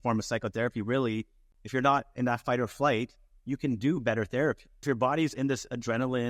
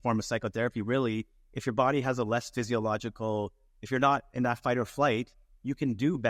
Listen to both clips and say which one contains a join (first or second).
first